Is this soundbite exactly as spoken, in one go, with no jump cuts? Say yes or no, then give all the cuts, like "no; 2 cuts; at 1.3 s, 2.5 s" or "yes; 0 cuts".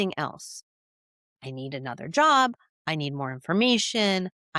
yes; 0 cuts